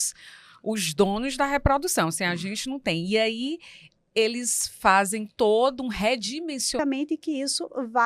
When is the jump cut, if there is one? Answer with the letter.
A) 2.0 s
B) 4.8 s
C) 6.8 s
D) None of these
C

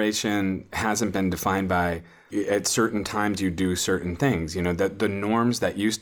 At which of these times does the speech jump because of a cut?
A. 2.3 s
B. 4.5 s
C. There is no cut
A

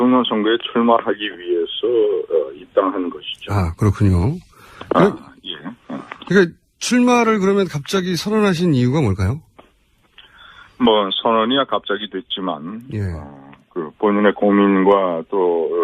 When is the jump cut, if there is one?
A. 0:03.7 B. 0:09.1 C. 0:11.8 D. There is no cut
A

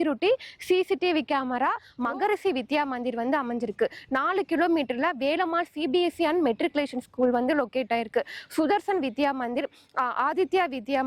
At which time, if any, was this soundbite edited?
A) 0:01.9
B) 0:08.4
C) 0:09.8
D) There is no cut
A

